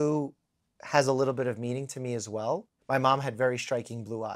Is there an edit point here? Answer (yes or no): yes